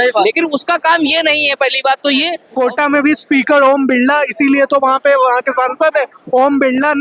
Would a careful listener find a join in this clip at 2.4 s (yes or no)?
yes